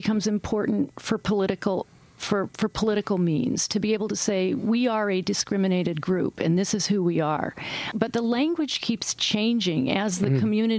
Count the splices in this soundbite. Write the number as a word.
one